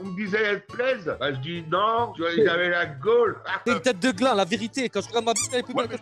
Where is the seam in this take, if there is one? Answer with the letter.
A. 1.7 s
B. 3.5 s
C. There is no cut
B